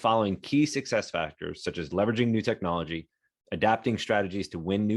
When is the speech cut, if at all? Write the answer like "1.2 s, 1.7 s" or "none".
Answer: none